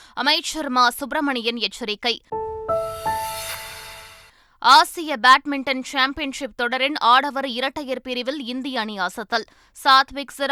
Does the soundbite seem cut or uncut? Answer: uncut